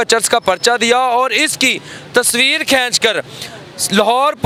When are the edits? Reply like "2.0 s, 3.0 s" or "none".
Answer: none